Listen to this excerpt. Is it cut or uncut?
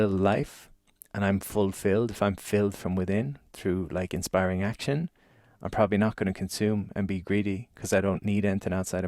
uncut